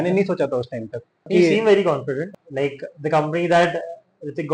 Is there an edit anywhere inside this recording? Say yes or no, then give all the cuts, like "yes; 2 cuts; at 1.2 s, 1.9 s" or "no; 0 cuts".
yes; 2 cuts; at 1.3 s, 2.4 s